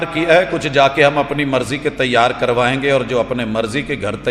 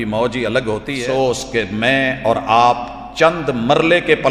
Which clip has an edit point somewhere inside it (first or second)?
second